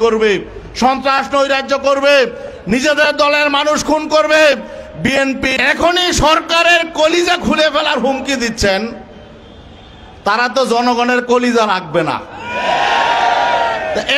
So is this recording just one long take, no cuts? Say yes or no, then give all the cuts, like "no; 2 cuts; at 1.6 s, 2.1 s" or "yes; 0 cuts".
no; 1 cut; at 5.5 s